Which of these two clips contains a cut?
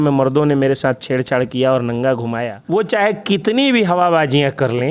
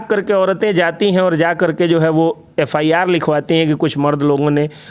first; 1 cut; at 2.5 s

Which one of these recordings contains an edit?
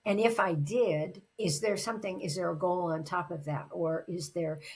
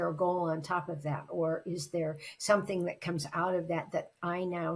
first; 1 cut; at 1.2 s

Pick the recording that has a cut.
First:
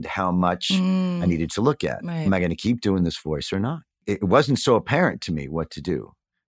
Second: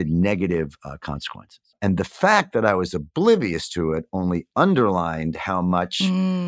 first; 2 cuts; at 2.1 s, 4.0 s

